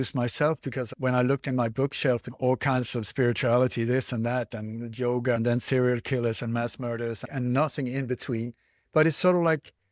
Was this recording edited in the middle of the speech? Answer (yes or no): yes